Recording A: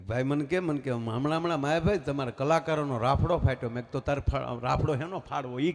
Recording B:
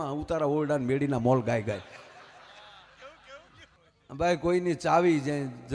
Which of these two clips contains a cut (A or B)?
B